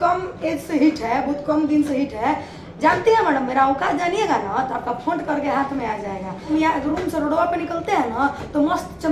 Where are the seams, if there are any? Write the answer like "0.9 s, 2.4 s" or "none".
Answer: 6.5 s